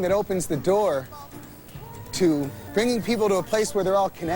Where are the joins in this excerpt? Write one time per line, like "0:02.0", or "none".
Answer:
0:02.6